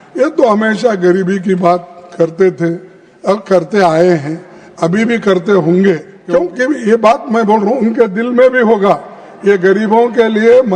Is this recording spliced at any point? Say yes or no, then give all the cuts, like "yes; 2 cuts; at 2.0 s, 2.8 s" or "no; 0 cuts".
yes; 1 cut; at 6.1 s